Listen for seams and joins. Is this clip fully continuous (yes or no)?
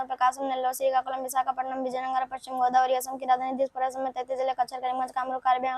yes